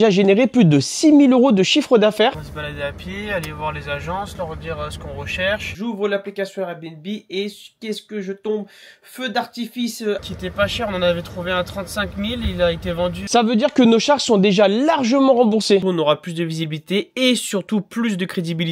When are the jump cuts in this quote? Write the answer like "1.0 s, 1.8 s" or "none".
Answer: 2.3 s, 5.7 s, 10.2 s, 13.3 s, 15.8 s